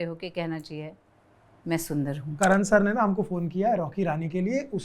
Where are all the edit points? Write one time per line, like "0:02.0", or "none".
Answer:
0:02.2